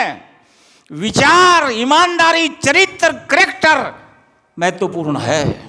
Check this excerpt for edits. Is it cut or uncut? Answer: uncut